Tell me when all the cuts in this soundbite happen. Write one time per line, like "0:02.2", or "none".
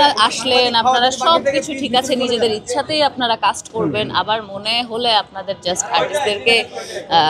none

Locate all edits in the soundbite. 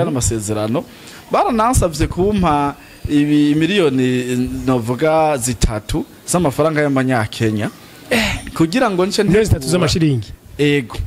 none

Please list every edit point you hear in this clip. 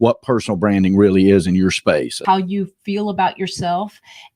0:02.2

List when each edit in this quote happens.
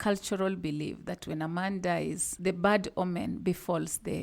0:02.3

